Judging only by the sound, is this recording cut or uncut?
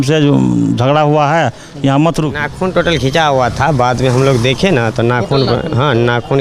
cut